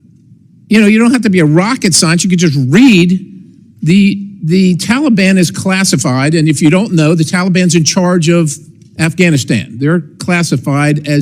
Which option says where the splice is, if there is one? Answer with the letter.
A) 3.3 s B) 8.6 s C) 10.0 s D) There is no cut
D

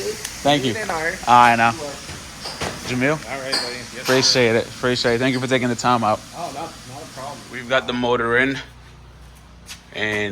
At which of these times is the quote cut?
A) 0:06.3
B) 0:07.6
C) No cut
B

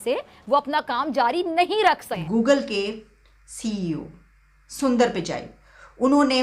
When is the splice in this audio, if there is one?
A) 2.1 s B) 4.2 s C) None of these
A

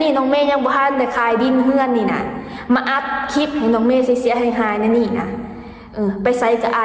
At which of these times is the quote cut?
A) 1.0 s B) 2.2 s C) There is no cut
C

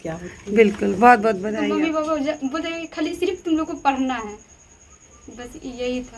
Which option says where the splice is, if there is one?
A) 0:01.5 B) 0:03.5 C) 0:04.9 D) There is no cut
A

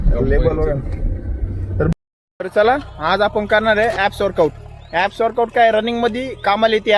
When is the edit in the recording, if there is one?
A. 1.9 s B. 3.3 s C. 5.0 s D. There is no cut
A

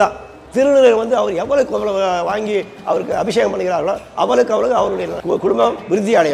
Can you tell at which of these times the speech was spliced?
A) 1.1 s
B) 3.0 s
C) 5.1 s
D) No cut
C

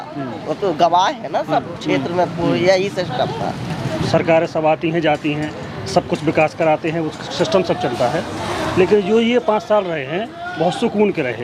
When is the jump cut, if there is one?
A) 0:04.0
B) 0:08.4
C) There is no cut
A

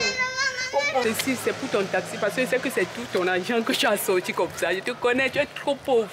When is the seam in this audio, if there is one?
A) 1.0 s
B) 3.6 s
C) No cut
A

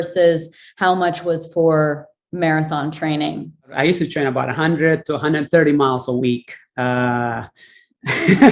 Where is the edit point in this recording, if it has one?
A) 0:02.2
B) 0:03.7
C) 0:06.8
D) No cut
B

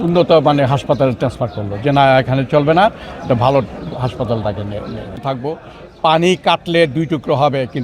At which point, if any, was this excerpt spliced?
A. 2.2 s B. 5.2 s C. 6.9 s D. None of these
B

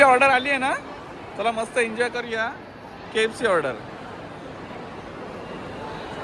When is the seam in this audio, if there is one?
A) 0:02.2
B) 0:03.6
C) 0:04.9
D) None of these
D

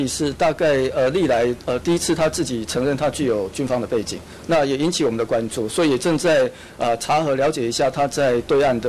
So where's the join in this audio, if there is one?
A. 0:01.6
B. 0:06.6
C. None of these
C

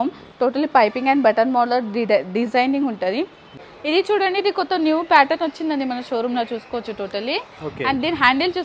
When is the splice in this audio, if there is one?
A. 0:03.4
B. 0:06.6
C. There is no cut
A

